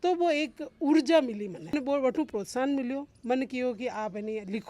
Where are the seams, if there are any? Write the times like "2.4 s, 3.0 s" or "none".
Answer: 1.7 s